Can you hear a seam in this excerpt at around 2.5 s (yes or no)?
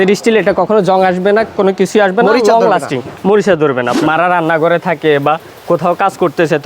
no